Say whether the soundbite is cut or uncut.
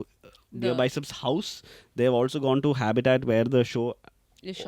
uncut